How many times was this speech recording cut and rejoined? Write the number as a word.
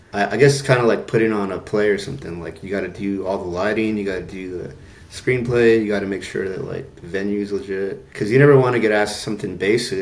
one